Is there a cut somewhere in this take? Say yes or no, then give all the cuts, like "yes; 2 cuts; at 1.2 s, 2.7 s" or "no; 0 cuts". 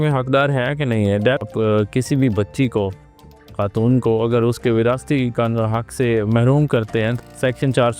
yes; 2 cuts; at 1.5 s, 7.1 s